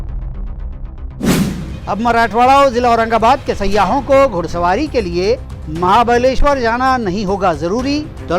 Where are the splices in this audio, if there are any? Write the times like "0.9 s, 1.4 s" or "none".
1.7 s